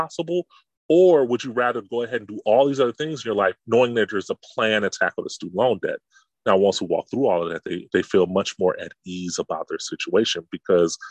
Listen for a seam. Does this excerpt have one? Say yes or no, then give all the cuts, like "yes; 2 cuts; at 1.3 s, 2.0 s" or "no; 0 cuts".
yes; 1 cut; at 3.6 s